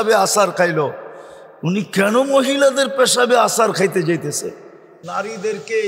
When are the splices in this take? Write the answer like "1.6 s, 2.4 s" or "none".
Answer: 5.0 s